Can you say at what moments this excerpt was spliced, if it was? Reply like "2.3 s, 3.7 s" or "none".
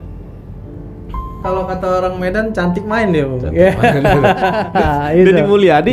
4.7 s